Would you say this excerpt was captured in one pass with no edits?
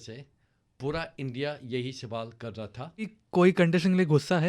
no; 1 cut; at 3.2 s

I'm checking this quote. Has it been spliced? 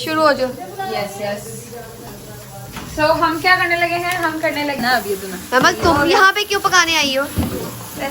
yes; 1 cut; at 4.8 s

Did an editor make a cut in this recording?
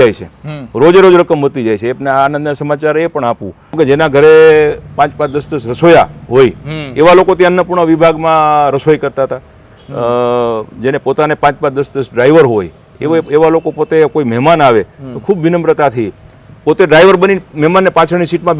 yes; 1 cut; at 3.8 s

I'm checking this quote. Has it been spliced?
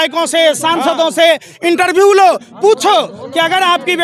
no; 0 cuts

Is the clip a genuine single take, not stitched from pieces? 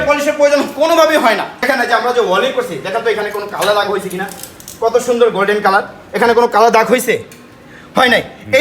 yes; 0 cuts

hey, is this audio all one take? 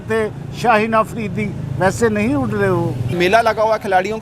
no; 1 cut; at 3.1 s

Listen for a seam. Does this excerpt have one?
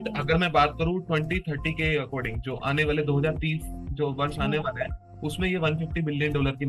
no; 0 cuts

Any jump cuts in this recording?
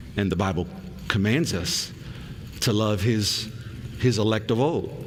no; 0 cuts

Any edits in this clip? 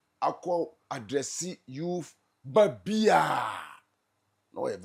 no; 0 cuts

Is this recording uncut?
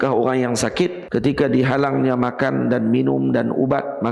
no; 1 cut; at 1.0 s

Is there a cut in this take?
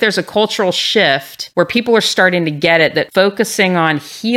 yes; 2 cuts; at 1.4 s, 3.1 s

